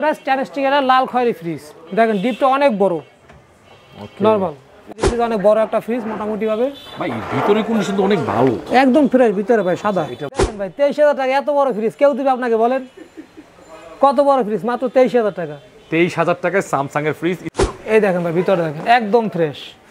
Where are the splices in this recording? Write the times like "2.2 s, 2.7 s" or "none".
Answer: 4.9 s, 10.4 s, 17.5 s